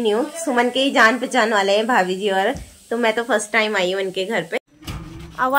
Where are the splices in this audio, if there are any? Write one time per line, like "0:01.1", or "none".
0:04.6